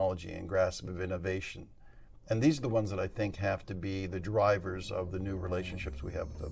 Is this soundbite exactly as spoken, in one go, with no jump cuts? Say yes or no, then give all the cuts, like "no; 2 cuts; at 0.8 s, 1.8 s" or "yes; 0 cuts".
yes; 0 cuts